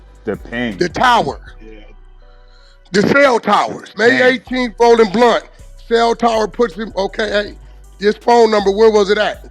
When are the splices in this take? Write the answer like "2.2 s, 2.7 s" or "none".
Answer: 3.9 s